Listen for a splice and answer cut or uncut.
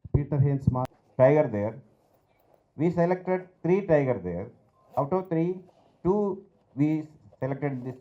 cut